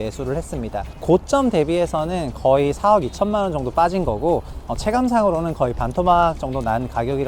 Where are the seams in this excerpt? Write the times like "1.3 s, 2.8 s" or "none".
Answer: 0.9 s